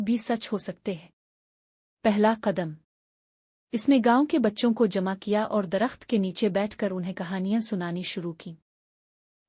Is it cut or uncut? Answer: cut